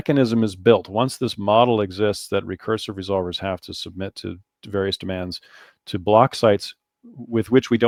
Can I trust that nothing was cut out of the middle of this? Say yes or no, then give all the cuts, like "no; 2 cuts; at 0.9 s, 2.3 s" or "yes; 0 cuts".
yes; 0 cuts